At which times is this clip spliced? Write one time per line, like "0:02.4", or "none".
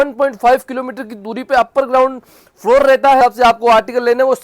0:03.2